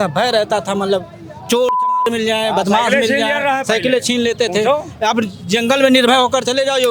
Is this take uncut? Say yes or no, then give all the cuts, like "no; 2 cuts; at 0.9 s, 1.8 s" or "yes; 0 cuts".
yes; 0 cuts